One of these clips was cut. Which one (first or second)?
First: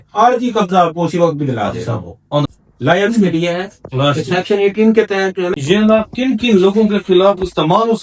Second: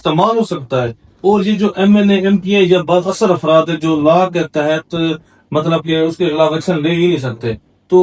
first